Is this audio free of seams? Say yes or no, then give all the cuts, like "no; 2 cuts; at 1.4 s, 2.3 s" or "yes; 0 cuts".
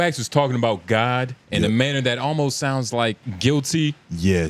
no; 2 cuts; at 1.4 s, 3.3 s